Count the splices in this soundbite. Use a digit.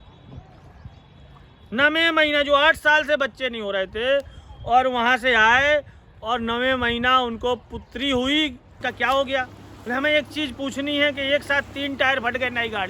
1